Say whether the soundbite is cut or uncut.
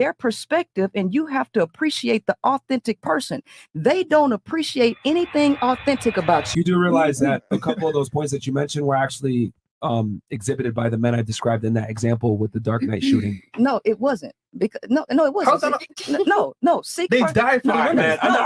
cut